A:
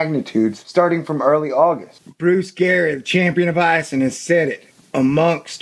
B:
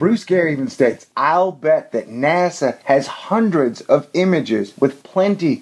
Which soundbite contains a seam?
A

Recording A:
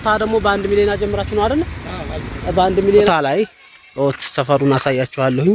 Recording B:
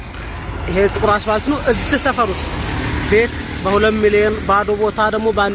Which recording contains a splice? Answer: A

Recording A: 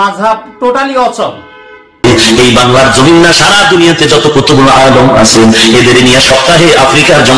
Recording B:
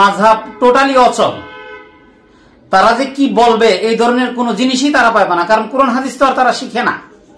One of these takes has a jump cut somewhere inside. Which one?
A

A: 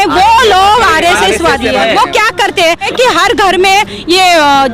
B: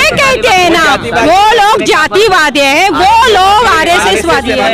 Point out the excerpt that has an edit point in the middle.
A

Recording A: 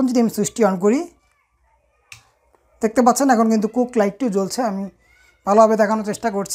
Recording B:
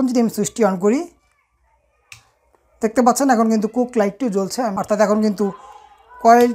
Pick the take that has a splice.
B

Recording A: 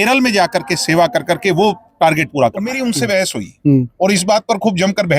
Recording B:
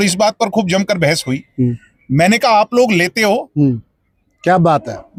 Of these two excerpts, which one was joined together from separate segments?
A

